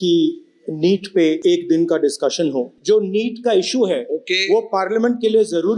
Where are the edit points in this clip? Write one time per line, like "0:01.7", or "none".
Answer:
0:01.4
0:02.7